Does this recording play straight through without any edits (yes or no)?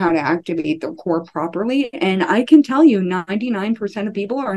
yes